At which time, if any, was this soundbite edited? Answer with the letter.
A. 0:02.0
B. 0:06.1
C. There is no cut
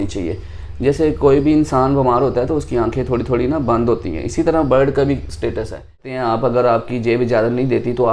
B